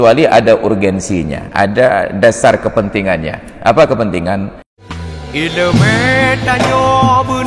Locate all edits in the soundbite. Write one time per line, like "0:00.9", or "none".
0:04.8